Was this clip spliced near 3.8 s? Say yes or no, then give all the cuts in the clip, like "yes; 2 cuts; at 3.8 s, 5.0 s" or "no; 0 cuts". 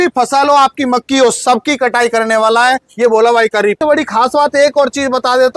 yes; 1 cut; at 3.8 s